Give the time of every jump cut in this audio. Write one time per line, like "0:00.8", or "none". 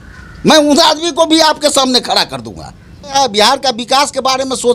0:03.2